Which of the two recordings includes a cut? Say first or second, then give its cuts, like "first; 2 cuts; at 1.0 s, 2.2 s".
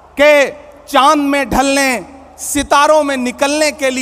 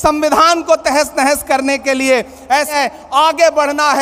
second; 1 cut; at 2.7 s